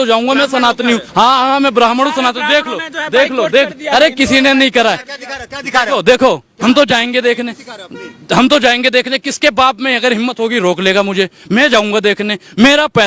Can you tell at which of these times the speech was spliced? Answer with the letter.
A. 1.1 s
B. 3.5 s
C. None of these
A